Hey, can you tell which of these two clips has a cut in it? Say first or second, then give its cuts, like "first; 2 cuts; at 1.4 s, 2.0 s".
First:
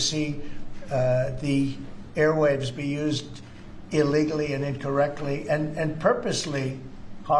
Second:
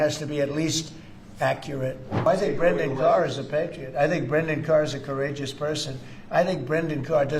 second; 1 cut; at 2.3 s